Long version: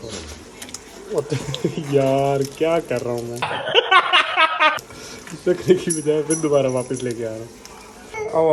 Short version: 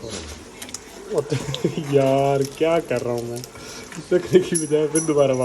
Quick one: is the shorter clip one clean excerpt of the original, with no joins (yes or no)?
no